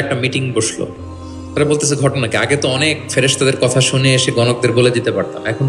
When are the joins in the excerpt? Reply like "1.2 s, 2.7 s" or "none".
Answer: none